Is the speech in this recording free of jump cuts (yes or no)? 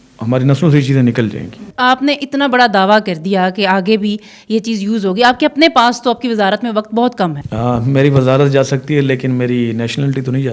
no